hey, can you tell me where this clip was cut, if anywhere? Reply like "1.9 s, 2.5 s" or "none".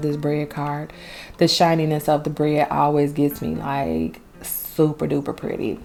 none